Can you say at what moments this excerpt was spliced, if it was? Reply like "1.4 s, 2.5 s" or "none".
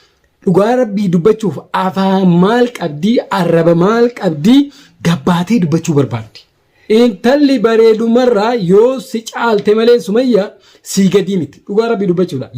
6.6 s